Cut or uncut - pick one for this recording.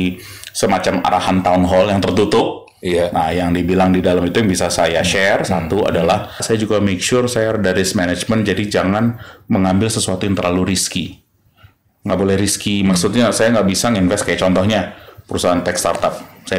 cut